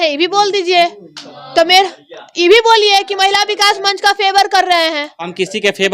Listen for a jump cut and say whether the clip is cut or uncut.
uncut